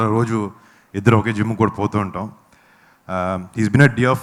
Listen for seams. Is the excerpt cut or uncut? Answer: uncut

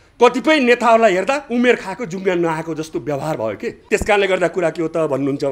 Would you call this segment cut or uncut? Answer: cut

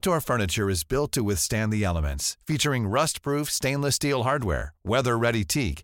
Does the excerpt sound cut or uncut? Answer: uncut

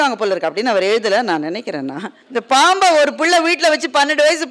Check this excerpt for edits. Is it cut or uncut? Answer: cut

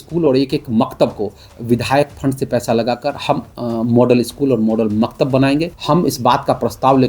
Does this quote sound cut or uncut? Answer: cut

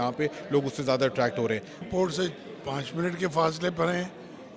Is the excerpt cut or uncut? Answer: cut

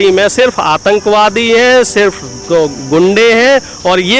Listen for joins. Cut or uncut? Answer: uncut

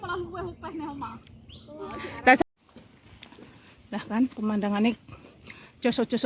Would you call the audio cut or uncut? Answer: cut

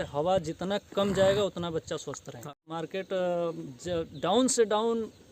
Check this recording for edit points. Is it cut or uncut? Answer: cut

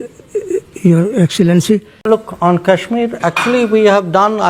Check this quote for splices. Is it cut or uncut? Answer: cut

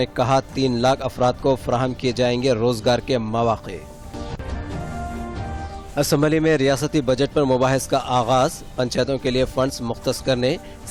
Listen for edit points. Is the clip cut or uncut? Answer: uncut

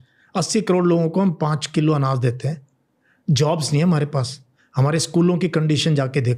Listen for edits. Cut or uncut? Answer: uncut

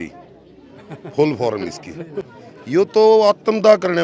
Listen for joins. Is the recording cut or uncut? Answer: uncut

